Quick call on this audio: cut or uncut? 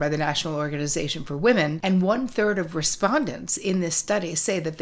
cut